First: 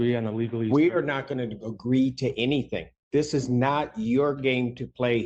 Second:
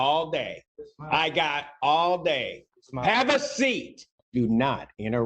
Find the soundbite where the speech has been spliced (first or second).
second